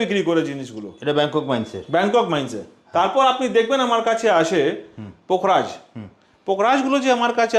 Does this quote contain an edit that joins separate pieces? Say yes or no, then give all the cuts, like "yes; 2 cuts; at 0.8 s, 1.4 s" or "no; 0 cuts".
no; 0 cuts